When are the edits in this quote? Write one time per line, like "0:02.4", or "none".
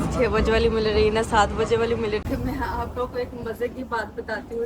0:02.2